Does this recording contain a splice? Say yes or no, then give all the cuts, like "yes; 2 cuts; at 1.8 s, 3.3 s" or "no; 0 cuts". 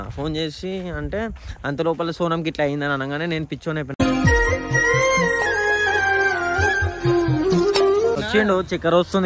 yes; 1 cut; at 8.2 s